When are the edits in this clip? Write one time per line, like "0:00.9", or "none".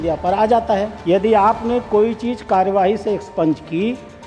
0:00.9